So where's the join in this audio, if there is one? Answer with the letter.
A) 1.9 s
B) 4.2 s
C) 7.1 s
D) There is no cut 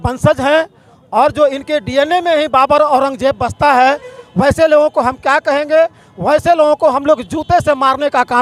D